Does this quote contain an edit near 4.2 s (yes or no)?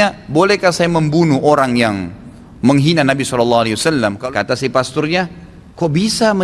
yes